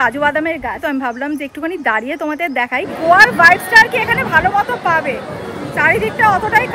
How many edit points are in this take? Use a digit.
2